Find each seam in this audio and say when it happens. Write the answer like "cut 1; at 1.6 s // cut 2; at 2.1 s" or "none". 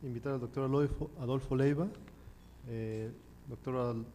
none